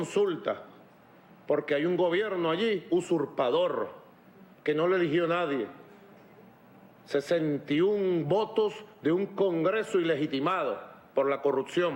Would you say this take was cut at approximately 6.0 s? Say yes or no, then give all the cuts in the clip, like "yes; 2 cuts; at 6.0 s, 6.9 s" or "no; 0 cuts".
no; 1 cut; at 10.4 s